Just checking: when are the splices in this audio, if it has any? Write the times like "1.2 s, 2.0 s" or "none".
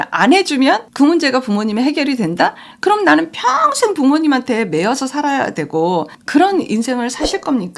6.2 s